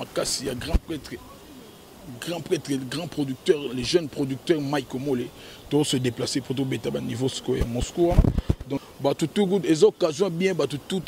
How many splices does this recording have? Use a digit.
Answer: 1